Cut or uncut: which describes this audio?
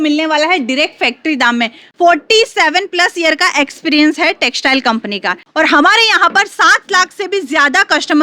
cut